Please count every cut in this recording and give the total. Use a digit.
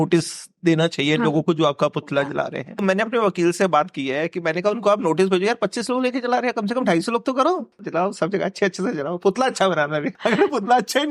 3